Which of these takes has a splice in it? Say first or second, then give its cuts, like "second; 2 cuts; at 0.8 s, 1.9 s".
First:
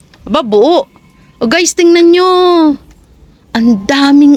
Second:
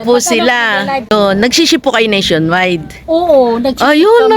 second; 1 cut; at 1.1 s